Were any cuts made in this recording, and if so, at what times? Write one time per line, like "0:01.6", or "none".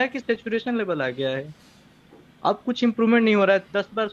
none